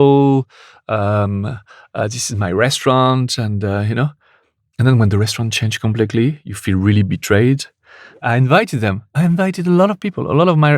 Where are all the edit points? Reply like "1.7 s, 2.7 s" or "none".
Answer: 8.2 s